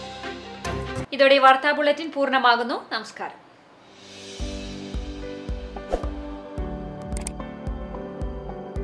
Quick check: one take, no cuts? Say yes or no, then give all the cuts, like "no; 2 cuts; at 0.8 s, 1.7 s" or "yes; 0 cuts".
yes; 0 cuts